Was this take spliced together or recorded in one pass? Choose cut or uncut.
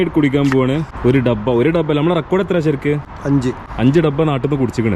cut